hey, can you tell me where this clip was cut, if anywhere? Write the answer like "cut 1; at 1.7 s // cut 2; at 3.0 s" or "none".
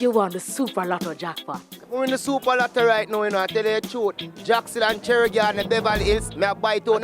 cut 1; at 1.7 s